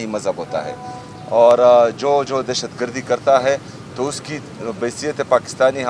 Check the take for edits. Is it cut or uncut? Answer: uncut